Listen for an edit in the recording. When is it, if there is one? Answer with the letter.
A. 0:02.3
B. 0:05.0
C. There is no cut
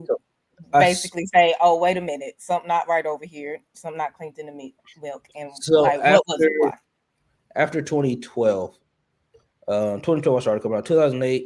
C